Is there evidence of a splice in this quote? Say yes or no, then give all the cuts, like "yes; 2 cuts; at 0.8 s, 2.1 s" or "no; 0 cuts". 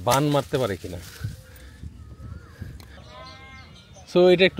yes; 1 cut; at 3.0 s